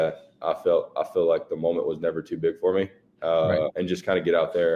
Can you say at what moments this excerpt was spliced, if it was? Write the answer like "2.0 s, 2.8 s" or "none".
3.8 s